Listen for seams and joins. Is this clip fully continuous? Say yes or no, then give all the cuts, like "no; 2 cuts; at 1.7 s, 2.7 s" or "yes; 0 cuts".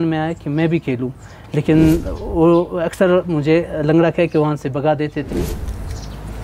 no; 1 cut; at 5.3 s